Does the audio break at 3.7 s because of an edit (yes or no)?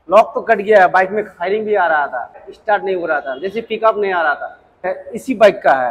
no